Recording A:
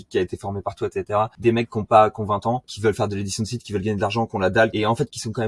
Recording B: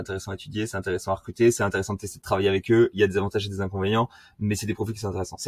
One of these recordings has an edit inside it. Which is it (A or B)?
A